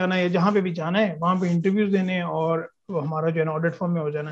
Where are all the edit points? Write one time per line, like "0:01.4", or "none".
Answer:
none